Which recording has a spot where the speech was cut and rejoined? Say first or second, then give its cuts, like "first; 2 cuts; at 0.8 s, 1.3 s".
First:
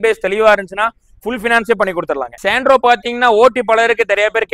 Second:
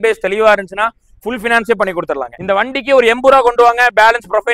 second; 1 cut; at 2.3 s